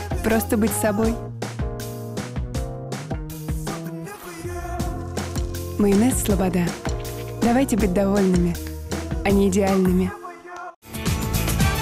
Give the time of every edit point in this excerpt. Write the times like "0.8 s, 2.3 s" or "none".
none